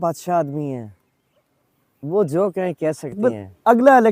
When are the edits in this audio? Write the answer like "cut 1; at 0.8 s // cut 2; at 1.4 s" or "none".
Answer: cut 1; at 3.2 s